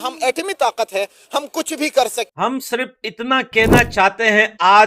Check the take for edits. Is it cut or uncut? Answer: cut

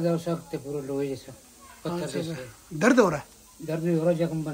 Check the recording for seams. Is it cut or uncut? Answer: uncut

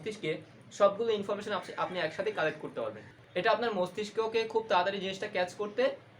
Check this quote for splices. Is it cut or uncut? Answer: cut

